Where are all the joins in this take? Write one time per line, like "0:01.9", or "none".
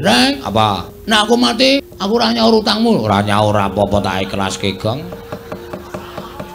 0:00.9
0:01.9